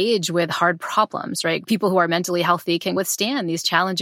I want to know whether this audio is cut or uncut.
cut